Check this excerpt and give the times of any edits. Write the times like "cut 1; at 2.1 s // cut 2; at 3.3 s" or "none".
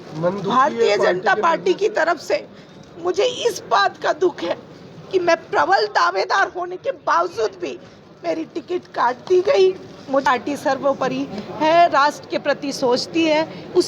cut 1; at 10.2 s